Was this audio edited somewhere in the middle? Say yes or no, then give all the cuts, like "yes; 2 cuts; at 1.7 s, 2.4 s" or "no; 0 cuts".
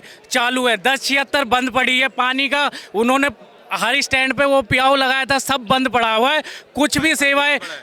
no; 0 cuts